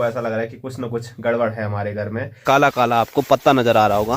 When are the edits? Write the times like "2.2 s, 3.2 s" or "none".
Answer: 2.4 s